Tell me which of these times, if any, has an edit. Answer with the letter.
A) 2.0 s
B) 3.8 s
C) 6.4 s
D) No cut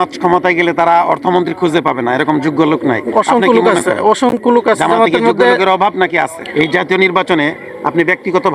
C